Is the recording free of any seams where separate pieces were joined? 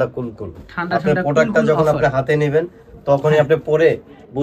yes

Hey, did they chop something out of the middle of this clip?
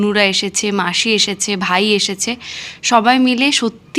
no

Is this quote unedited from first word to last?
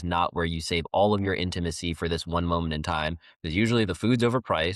yes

